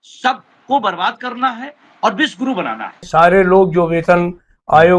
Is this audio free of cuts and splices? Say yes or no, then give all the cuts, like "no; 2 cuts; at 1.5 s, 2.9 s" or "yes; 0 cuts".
no; 1 cut; at 3.1 s